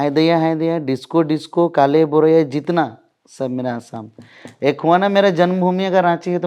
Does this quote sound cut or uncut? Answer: uncut